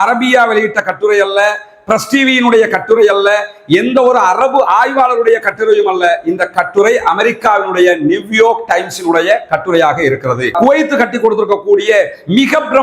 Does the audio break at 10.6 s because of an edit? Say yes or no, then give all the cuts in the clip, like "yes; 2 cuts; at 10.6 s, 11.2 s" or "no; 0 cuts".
yes; 1 cut; at 10.6 s